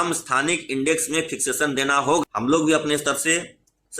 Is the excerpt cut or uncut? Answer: cut